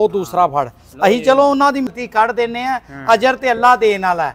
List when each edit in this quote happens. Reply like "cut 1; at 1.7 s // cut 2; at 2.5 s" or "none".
cut 1; at 1.9 s